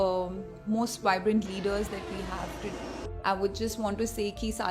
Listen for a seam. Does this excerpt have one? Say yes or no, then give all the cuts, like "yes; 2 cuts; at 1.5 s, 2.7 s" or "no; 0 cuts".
yes; 1 cut; at 2.9 s